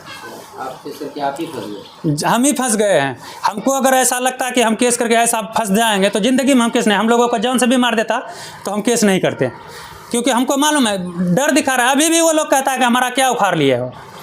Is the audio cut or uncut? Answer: uncut